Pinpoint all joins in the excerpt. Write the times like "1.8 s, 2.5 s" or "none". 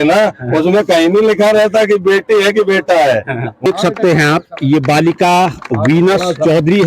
3.7 s